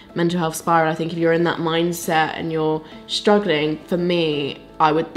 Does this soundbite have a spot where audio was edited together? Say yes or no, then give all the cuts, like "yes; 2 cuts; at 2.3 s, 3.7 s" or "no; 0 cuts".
no; 0 cuts